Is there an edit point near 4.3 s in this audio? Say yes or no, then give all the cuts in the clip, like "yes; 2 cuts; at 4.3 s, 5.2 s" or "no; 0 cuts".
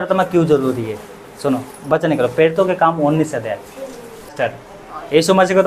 yes; 1 cut; at 4.3 s